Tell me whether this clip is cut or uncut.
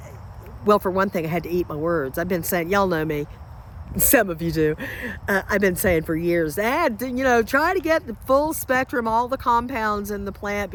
uncut